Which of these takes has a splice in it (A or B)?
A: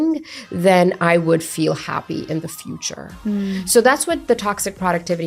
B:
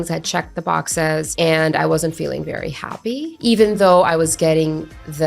B